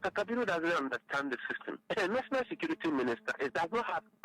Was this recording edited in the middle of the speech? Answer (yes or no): yes